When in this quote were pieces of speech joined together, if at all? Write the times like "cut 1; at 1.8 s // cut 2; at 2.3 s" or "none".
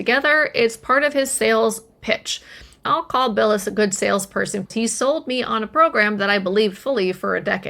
cut 1; at 2.8 s // cut 2; at 4.7 s